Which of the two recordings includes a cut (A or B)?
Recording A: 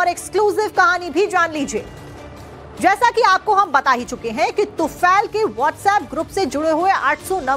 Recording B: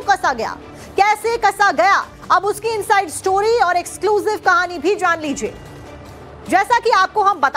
A